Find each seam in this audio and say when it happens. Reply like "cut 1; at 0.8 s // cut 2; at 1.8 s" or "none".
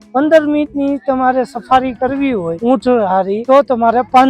cut 1; at 2.5 s // cut 2; at 3.4 s